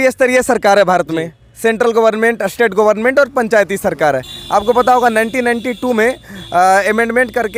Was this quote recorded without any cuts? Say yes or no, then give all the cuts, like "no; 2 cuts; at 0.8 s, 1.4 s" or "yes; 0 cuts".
yes; 0 cuts